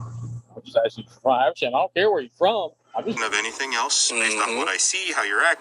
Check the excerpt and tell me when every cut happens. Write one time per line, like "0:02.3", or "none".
0:03.1